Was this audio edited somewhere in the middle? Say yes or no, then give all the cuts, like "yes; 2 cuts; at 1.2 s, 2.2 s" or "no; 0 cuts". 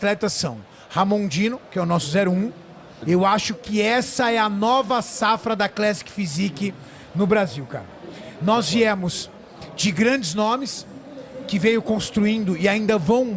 yes; 1 cut; at 3.0 s